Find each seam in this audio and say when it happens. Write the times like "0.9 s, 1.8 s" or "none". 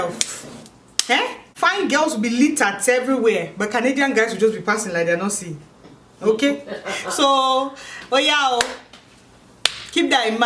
1.4 s